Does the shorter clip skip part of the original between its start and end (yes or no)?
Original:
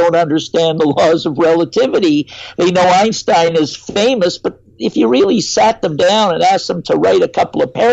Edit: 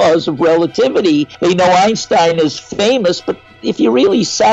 yes